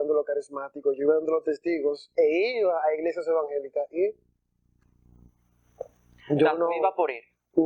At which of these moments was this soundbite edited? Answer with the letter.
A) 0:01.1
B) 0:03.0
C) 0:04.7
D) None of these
D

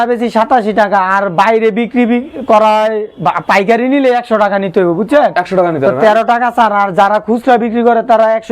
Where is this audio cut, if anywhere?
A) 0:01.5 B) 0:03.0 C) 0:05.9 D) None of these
D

